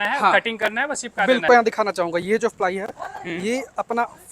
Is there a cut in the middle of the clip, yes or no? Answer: yes